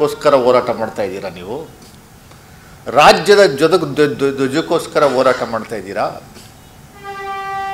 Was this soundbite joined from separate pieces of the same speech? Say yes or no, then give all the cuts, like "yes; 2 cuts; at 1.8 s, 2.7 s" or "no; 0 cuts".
no; 0 cuts